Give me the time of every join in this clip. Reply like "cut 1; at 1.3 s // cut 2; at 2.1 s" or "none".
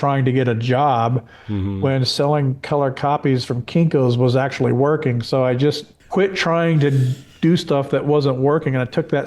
cut 1; at 6.0 s